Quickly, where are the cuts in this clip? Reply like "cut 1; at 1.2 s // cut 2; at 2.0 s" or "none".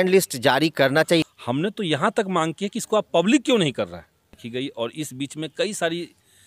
cut 1; at 1.3 s // cut 2; at 4.4 s

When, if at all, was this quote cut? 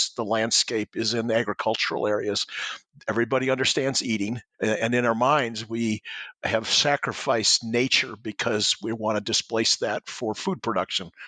cut 1; at 4.4 s

